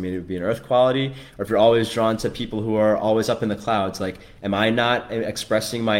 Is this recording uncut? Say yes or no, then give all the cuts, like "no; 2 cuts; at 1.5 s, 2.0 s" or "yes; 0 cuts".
yes; 0 cuts